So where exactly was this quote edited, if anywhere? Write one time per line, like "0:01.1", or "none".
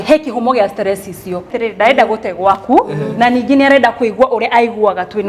0:01.5